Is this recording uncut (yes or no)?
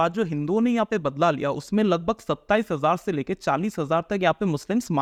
yes